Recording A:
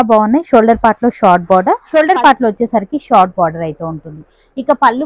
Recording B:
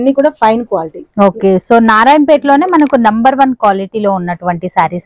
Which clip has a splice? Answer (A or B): A